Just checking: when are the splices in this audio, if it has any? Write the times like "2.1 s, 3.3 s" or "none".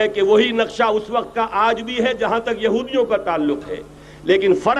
none